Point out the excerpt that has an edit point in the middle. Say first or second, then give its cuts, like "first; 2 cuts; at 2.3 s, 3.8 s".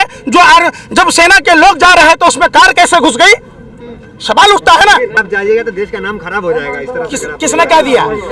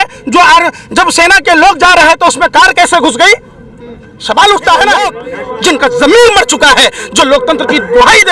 second; 1 cut; at 5.3 s